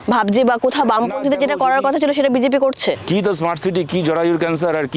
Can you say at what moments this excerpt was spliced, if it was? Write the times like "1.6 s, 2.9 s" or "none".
3.0 s